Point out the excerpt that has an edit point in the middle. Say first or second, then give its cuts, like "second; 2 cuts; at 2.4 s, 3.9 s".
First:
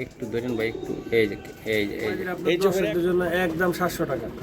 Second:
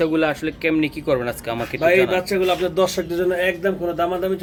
first; 1 cut; at 2.8 s